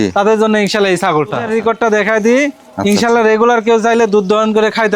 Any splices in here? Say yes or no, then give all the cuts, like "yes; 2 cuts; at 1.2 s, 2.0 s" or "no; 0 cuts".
yes; 1 cut; at 1.4 s